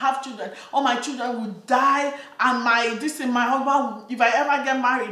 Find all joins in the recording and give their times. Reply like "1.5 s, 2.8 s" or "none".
none